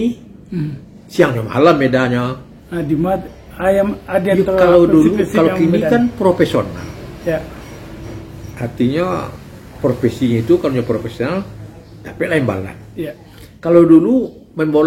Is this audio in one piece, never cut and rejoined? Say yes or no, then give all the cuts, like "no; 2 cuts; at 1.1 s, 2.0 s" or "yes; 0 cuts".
yes; 0 cuts